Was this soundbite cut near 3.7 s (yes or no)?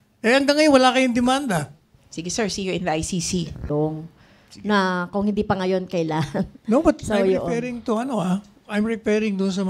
yes